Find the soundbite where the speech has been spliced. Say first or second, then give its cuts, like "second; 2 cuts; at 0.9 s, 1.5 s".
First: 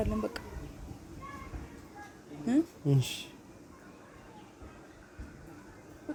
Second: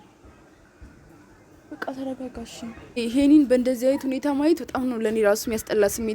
second; 1 cut; at 3.0 s